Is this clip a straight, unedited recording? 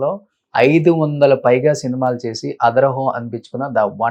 yes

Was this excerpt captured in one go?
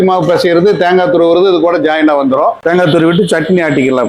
no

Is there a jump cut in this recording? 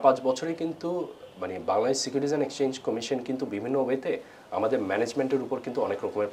no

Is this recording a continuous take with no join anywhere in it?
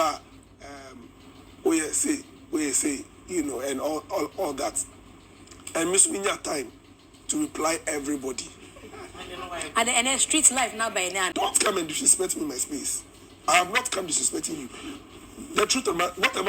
no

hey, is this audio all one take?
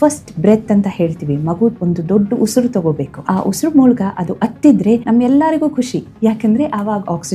no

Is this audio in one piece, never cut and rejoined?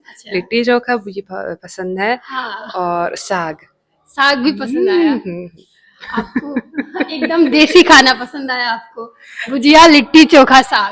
yes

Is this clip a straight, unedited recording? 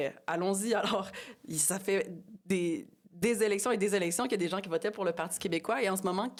yes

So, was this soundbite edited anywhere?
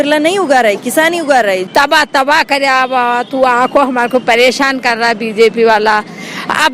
yes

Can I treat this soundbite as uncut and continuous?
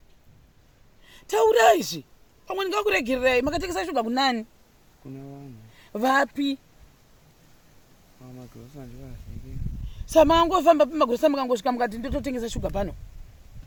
yes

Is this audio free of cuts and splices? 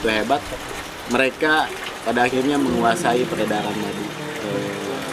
yes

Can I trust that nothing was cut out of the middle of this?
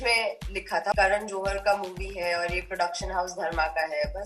no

